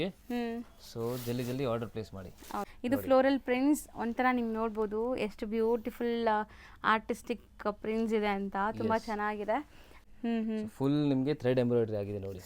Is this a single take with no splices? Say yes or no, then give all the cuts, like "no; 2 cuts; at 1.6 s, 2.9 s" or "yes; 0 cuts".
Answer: no; 2 cuts; at 2.7 s, 9.9 s